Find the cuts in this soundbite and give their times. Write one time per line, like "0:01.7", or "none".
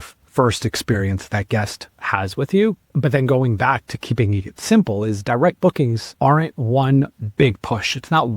0:02.9
0:06.0